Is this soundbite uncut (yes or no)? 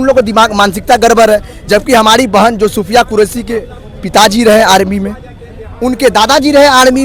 yes